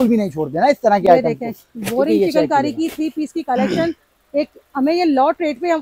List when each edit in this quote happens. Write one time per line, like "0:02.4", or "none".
none